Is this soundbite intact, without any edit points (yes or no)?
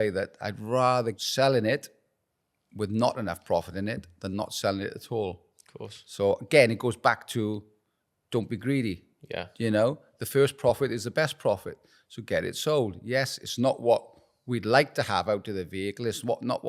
no